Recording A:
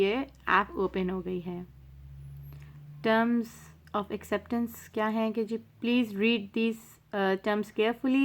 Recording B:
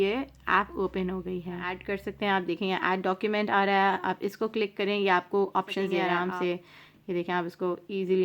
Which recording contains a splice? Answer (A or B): B